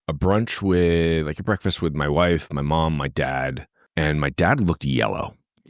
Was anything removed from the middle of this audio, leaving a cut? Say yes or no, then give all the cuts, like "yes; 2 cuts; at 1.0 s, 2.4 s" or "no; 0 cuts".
yes; 1 cut; at 3.8 s